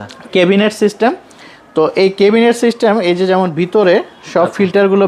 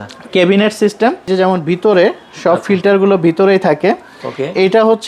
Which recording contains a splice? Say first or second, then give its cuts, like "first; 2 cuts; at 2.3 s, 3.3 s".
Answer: second; 1 cut; at 1.3 s